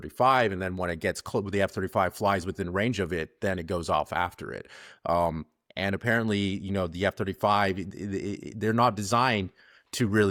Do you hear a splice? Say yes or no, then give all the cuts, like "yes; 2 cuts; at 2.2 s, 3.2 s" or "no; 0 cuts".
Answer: no; 0 cuts